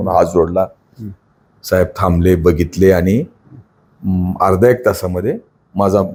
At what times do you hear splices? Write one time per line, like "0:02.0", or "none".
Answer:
none